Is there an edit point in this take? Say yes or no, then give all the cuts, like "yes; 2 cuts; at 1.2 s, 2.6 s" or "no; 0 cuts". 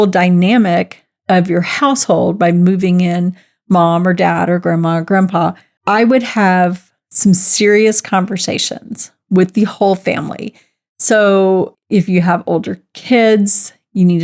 no; 0 cuts